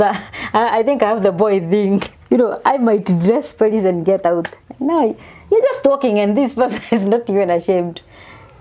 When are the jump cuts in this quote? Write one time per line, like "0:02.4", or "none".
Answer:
0:02.1